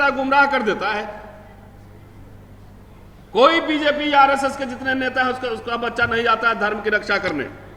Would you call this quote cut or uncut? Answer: uncut